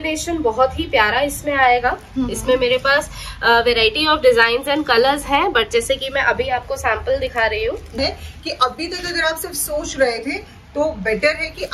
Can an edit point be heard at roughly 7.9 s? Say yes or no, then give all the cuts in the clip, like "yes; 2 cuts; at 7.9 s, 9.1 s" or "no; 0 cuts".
yes; 1 cut; at 7.9 s